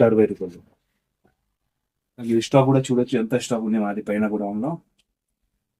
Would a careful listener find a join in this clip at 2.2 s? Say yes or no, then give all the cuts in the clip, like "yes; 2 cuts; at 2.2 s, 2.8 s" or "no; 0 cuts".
yes; 1 cut; at 2.2 s